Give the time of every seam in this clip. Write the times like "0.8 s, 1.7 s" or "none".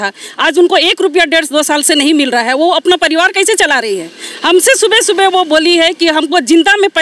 none